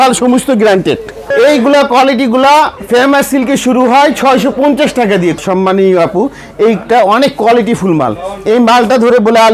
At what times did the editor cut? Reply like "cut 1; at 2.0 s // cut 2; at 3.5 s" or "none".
cut 1; at 1.3 s // cut 2; at 5.4 s